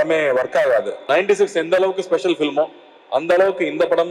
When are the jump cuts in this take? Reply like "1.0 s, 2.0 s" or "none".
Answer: 1.0 s